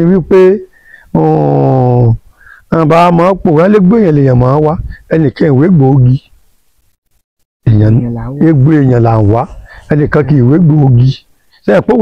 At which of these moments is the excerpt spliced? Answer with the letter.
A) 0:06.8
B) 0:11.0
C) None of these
C